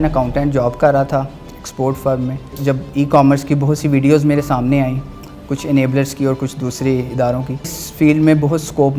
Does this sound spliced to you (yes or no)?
yes